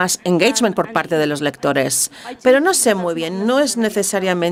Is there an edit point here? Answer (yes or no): no